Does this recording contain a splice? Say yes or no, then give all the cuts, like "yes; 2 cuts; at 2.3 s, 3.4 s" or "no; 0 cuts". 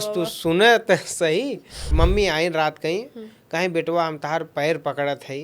yes; 1 cut; at 1.9 s